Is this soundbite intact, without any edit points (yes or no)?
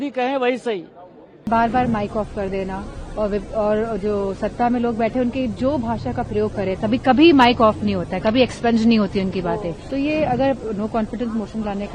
no